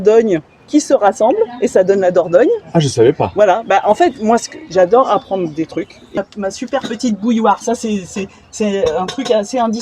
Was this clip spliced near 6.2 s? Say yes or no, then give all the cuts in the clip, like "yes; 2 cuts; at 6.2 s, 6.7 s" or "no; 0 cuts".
yes; 1 cut; at 6.2 s